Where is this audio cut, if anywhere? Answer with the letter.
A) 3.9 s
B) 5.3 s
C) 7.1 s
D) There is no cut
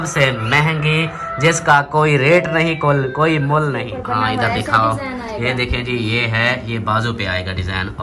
A